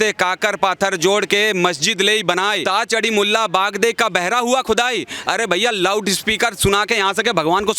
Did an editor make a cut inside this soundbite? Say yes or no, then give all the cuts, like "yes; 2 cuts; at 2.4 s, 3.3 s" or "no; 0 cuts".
yes; 1 cut; at 2.6 s